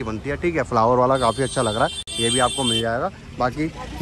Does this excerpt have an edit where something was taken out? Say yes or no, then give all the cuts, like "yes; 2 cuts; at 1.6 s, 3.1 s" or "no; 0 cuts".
no; 0 cuts